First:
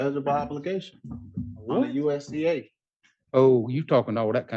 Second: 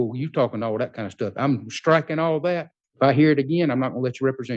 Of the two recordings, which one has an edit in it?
second; 1 cut; at 2.8 s

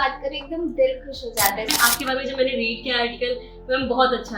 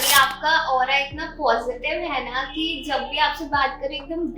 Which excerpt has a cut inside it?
first; 1 cut; at 1.7 s

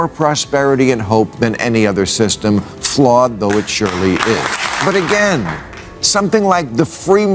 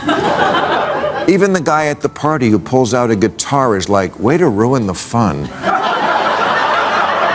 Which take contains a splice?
first; 1 cut; at 4.8 s

